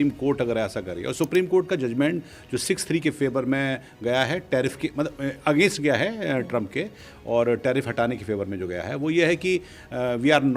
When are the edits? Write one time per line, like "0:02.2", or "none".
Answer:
none